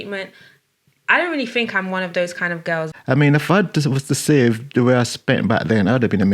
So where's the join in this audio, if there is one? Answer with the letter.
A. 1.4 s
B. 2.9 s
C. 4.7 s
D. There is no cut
B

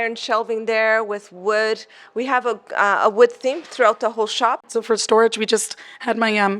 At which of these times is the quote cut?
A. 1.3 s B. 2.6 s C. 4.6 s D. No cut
C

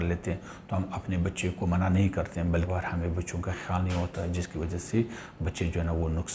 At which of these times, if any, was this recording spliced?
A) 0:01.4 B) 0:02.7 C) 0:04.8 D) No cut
B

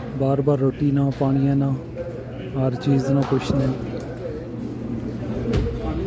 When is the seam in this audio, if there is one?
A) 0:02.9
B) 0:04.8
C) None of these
C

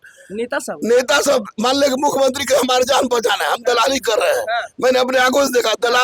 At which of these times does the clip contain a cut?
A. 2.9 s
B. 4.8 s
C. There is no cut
C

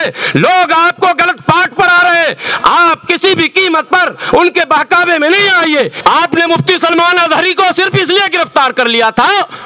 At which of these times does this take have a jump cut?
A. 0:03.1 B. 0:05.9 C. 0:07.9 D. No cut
B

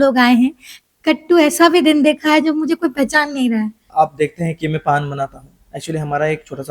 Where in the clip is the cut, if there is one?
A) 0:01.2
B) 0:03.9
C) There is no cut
B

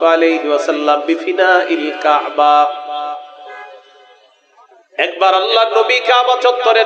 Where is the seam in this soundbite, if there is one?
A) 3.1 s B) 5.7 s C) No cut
C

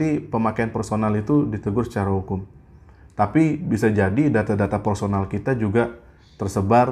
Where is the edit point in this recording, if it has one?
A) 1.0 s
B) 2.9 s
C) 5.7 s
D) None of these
D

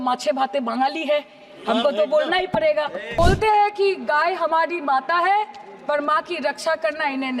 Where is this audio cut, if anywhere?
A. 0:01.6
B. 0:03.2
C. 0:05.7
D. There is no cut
B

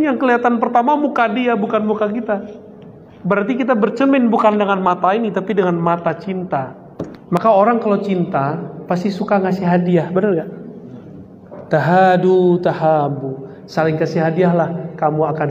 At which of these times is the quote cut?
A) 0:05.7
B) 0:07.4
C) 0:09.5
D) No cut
B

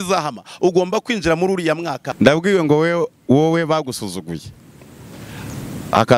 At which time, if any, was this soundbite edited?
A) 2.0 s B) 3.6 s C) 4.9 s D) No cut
A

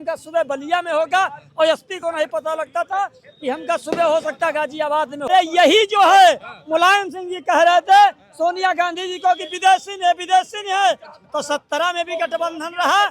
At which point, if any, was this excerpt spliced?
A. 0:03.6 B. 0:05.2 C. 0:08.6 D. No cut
B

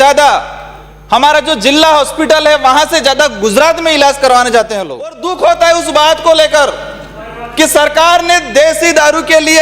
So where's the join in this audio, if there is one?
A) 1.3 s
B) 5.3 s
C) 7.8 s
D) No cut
B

